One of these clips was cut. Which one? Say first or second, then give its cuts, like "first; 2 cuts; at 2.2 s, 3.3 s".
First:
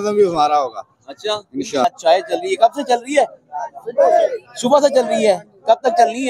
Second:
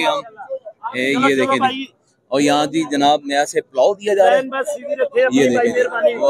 first; 1 cut; at 1.8 s